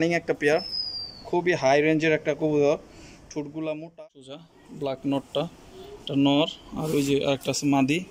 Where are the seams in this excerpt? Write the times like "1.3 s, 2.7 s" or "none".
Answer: 4.5 s